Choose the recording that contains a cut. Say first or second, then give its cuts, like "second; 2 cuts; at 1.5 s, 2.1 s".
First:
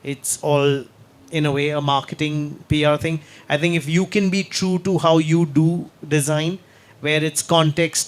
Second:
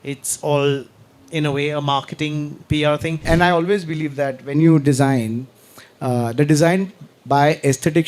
second; 1 cut; at 3.2 s